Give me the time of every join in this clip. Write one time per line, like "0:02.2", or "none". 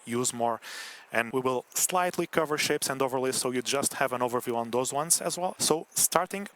0:01.3
0:05.6